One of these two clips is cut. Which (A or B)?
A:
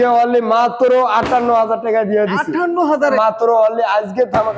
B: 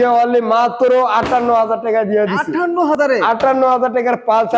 A